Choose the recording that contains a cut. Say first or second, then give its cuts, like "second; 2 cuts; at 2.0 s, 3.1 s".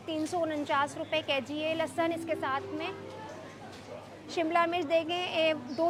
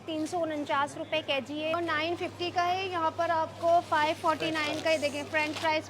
second; 1 cut; at 1.7 s